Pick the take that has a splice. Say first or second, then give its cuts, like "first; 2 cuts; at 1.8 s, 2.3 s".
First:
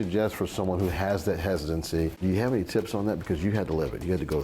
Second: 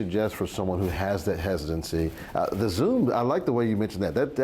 first; 1 cut; at 2.2 s